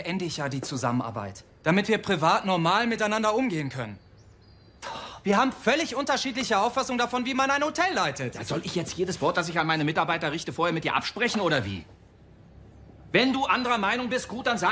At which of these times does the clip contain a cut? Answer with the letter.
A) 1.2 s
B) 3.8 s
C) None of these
A